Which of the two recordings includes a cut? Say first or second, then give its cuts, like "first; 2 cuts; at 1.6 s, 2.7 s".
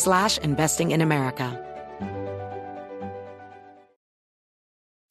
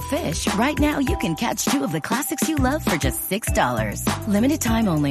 first; 1 cut; at 1.5 s